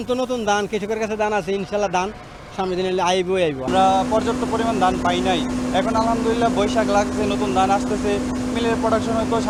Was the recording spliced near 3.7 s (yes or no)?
no